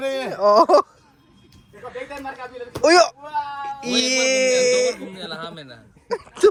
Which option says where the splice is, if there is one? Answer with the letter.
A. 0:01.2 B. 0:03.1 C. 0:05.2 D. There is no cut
D